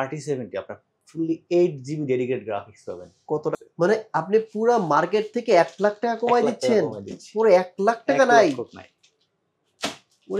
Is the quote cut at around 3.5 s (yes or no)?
yes